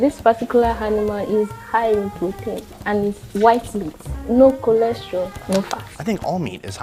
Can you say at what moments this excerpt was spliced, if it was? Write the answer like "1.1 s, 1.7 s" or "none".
none